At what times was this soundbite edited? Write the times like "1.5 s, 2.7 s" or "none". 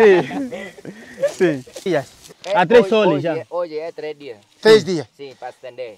1.8 s